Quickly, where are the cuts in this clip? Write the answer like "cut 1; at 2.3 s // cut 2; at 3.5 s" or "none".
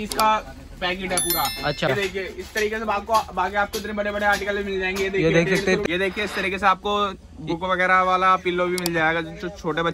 cut 1; at 1.9 s // cut 2; at 5.8 s